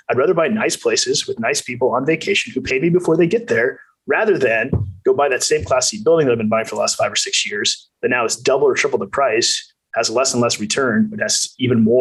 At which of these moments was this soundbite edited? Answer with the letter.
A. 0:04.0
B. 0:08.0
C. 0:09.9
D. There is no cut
D